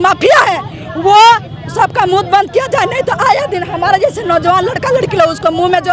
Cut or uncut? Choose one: uncut